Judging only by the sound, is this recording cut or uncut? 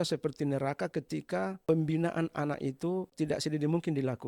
cut